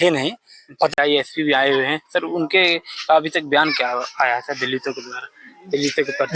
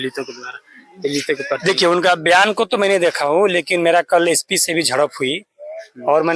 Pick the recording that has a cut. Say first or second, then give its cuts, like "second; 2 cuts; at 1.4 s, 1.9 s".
first; 1 cut; at 0.9 s